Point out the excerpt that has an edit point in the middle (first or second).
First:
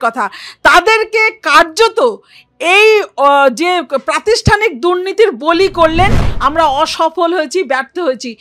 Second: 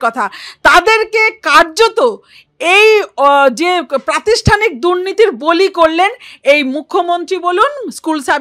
first